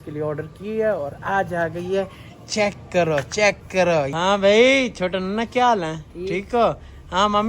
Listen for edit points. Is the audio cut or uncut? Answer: cut